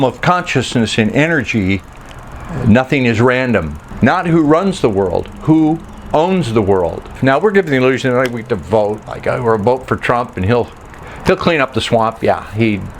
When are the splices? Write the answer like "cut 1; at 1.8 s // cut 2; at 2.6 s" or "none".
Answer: cut 1; at 3.8 s // cut 2; at 7.1 s